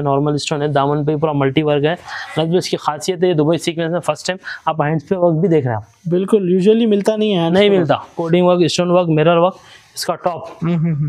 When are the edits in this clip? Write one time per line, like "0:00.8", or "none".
0:08.2